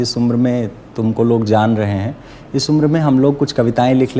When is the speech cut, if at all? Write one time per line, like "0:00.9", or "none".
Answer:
none